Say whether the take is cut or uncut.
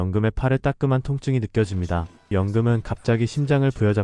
cut